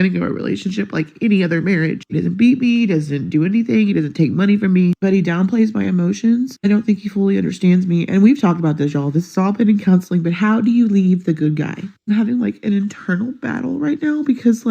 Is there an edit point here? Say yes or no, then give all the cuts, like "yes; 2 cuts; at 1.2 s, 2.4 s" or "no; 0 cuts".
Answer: yes; 1 cut; at 6.8 s